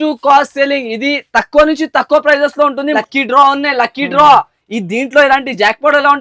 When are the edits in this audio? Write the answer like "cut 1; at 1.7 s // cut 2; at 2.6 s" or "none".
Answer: cut 1; at 2.9 s